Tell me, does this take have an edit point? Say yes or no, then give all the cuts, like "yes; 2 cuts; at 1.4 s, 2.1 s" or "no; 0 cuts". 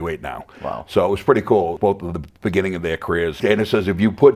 yes; 2 cuts; at 1.8 s, 3.4 s